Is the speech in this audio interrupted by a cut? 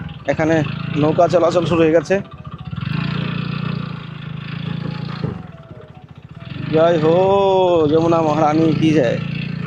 no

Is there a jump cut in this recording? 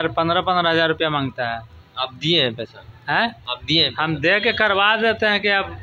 no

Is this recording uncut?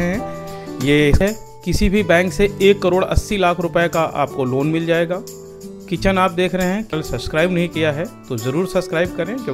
no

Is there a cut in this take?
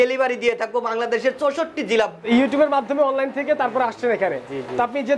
yes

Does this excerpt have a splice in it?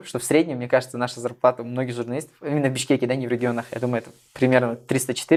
no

